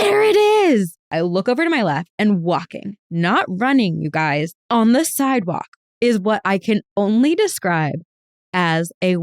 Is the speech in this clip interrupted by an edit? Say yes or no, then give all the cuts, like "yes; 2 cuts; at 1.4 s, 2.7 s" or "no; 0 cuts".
yes; 1 cut; at 1.0 s